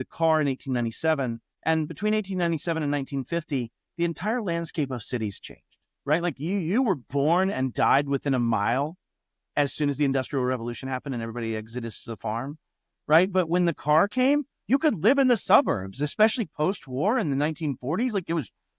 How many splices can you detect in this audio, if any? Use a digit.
1